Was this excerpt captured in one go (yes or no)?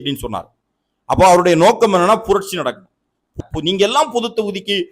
no